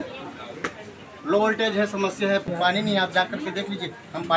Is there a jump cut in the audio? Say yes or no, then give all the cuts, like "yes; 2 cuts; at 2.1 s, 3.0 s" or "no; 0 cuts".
yes; 1 cut; at 2.5 s